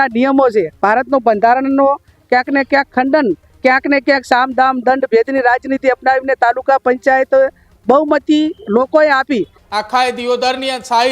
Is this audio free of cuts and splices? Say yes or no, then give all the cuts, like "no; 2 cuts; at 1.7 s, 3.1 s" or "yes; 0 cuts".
no; 2 cuts; at 3.5 s, 9.6 s